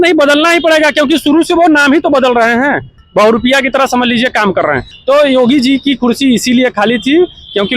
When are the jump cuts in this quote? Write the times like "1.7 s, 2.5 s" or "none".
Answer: 2.9 s, 4.9 s